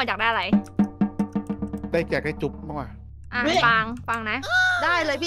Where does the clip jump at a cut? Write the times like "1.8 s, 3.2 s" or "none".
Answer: none